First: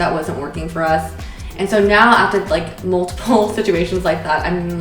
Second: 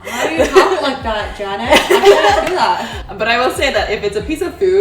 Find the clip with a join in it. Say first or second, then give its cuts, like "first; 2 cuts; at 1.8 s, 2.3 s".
second; 1 cut; at 2.9 s